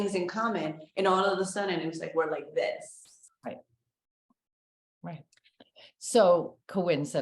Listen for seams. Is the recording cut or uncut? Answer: uncut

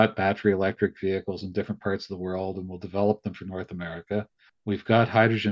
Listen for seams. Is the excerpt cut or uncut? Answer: cut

